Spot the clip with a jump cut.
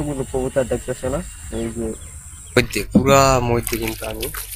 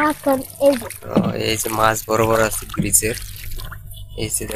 first; 1 cut; at 2.8 s

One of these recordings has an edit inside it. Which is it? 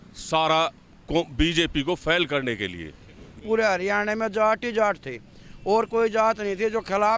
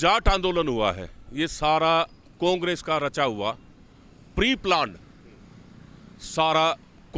first; 1 cut; at 3.4 s

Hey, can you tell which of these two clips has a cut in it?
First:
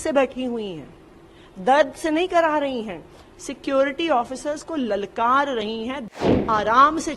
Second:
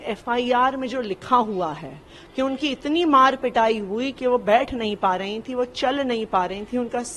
first; 1 cut; at 6.1 s

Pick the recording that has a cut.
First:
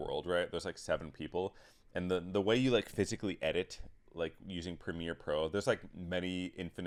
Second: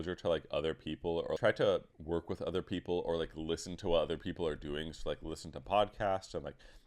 second; 2 cuts; at 1.4 s, 1.9 s

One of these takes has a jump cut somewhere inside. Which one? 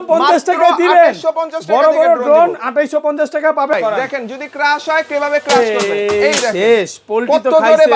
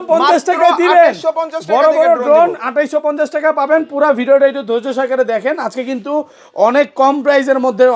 first; 1 cut; at 3.7 s

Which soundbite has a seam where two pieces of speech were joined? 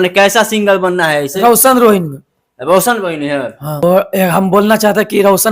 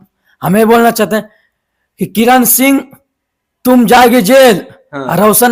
first; 1 cut; at 3.8 s

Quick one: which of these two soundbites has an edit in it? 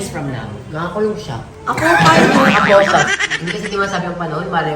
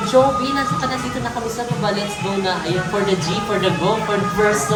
first; 1 cut; at 3.1 s

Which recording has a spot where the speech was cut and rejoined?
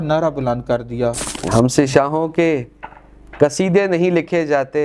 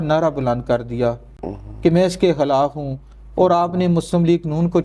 first; 1 cut; at 1.3 s

